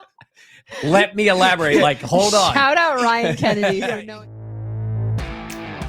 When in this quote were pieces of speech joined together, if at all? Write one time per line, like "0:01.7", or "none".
0:04.0